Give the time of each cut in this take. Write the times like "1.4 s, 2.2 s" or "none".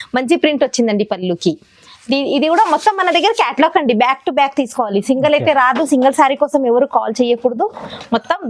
none